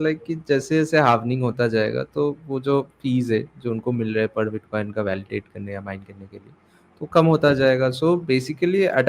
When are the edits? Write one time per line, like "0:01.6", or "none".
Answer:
none

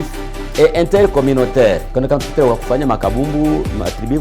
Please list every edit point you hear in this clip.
0:01.9

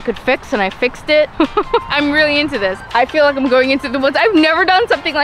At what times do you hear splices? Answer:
0:02.8

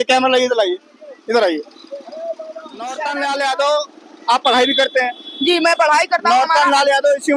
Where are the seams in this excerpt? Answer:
0:03.0

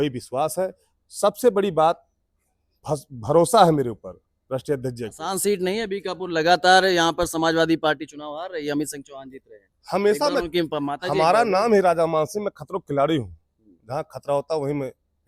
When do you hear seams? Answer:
0:05.2

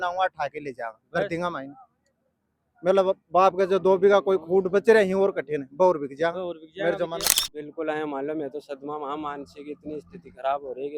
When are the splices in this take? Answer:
0:07.4

